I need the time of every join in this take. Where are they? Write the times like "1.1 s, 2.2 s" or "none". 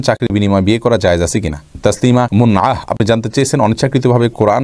1.7 s